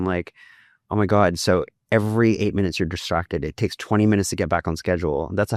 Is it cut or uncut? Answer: uncut